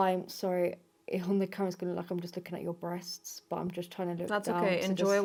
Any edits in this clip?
no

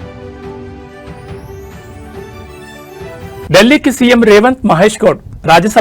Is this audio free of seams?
no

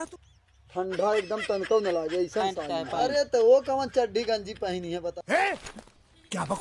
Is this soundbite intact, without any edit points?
no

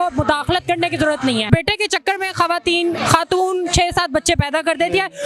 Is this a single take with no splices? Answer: no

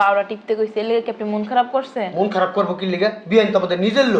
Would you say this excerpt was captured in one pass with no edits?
yes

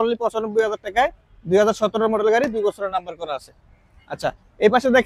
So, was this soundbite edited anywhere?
no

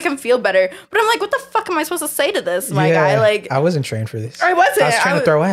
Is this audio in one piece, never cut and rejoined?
yes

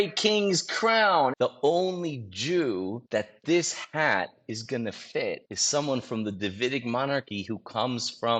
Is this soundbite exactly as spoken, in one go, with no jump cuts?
no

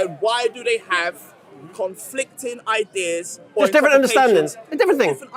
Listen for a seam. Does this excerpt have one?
no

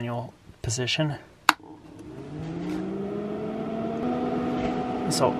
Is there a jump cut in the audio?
yes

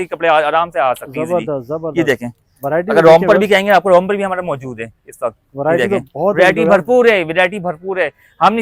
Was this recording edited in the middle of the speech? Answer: no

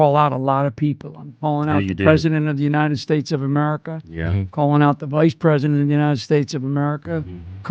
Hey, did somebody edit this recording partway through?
no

